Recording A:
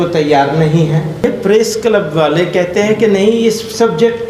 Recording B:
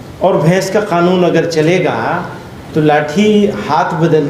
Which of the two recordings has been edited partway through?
A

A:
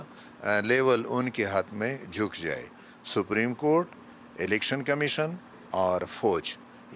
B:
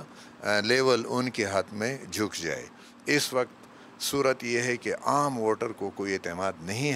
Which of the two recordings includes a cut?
A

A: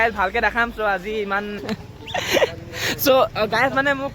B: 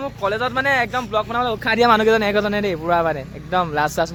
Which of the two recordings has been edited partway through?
A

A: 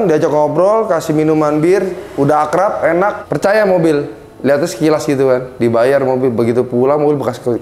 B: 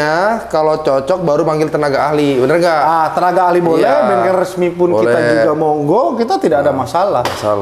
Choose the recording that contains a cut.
A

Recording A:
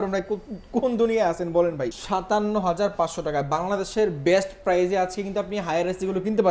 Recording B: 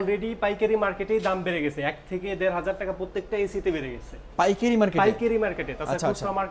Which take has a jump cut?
A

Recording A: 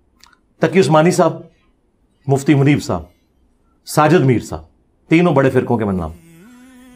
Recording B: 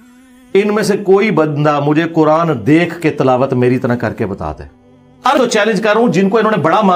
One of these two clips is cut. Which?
B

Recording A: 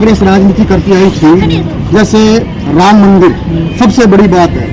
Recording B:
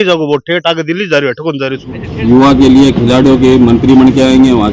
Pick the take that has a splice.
B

